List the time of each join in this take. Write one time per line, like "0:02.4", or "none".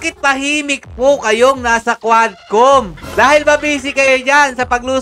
0:03.0